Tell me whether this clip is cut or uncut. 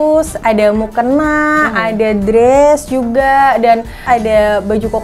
cut